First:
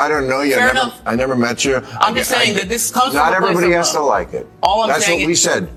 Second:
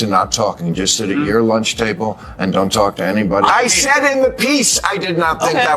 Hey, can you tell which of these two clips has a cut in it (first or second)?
second